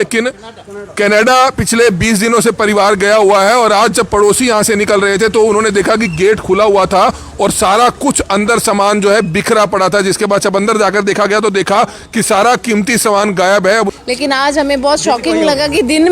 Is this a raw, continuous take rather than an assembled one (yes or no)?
no